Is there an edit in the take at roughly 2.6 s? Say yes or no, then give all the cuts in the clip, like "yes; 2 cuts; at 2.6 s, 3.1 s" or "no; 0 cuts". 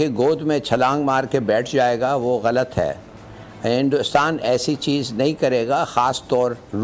no; 0 cuts